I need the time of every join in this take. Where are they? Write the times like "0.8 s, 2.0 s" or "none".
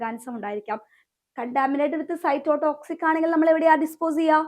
0.9 s